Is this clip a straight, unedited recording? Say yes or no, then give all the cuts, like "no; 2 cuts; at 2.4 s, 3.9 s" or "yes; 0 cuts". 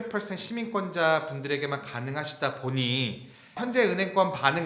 no; 1 cut; at 3.4 s